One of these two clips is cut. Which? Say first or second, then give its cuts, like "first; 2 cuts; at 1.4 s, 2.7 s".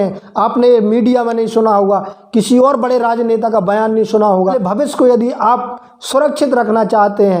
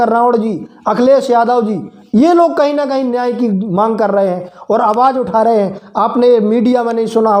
first; 1 cut; at 4.6 s